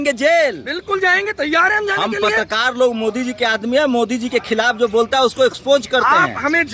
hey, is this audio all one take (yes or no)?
yes